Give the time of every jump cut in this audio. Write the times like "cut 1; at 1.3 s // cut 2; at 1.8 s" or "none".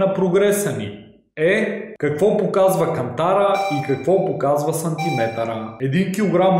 cut 1; at 1.9 s // cut 2; at 5.8 s

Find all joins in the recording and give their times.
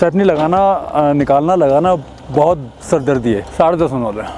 cut 1; at 3.5 s

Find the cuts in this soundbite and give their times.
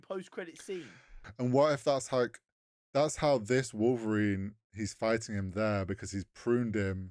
cut 1; at 1.2 s

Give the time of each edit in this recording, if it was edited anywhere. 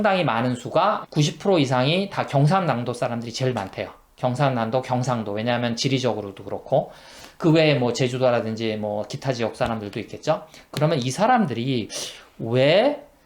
cut 1; at 1.0 s

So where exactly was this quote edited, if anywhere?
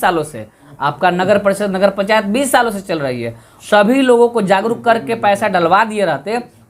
cut 1; at 3.5 s

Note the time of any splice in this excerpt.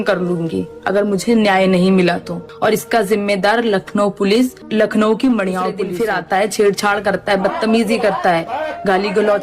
cut 1; at 5.8 s

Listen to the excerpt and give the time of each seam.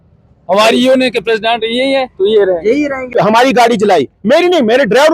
cut 1; at 3.1 s

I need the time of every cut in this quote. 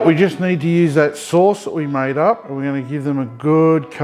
none

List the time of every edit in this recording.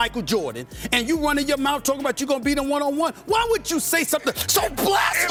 none

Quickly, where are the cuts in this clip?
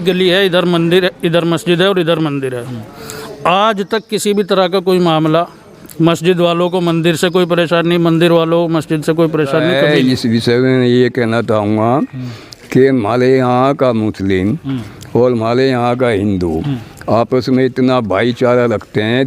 cut 1; at 9.7 s

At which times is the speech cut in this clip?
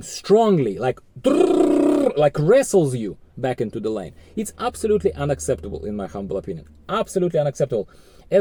none

